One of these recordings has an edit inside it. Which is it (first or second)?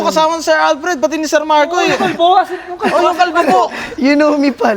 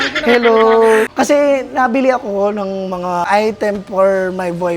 second